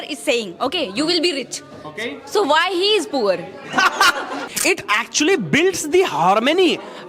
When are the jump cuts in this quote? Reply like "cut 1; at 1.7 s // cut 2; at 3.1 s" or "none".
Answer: cut 1; at 4.4 s